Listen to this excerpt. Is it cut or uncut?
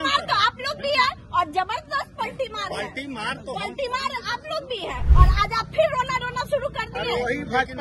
cut